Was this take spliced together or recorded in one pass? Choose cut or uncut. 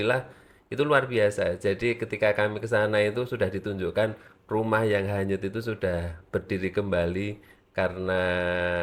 uncut